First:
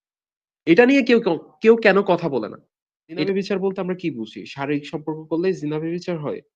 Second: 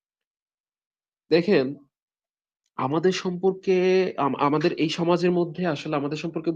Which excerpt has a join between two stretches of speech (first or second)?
first